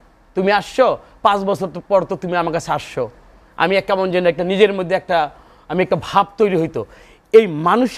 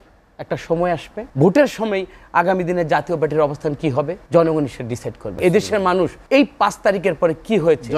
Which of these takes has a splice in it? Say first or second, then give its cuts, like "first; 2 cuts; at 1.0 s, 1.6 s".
second; 4 cuts; at 1.2 s, 4.2 s, 5.3 s, 6.2 s